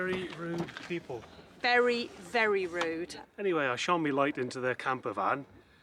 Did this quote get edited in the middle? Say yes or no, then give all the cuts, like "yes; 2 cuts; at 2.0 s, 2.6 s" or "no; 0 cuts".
yes; 1 cut; at 3.2 s